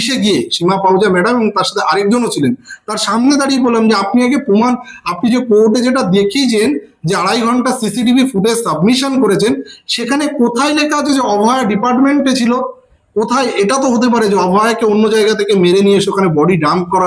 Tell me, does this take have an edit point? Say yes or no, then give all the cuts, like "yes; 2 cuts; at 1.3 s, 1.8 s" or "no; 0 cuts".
no; 0 cuts